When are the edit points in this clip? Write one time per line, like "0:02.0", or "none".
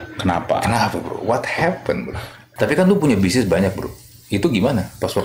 0:02.4